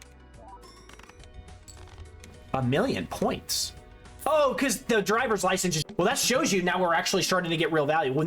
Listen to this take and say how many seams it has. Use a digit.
1